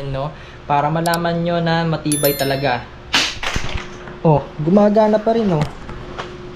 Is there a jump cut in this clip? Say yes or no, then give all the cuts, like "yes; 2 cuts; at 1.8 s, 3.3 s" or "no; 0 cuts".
no; 0 cuts